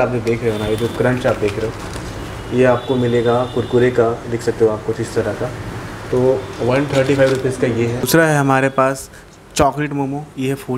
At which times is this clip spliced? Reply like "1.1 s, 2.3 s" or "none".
none